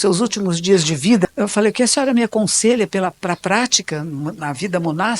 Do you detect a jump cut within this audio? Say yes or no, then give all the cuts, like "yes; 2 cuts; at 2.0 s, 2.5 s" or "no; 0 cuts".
yes; 1 cut; at 1.3 s